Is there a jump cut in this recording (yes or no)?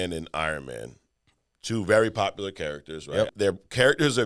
yes